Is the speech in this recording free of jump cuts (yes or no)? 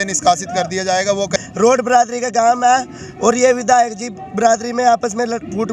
no